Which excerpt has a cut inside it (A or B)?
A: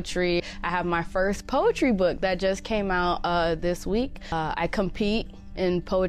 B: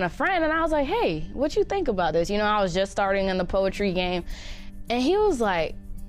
A